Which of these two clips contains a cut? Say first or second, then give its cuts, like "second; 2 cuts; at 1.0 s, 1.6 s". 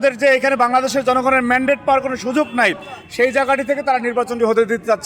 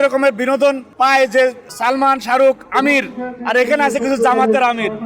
second; 2 cuts; at 0.9 s, 1.7 s